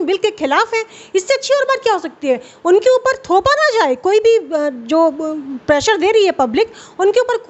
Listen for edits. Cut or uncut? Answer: uncut